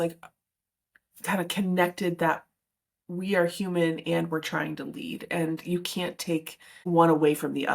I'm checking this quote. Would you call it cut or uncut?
cut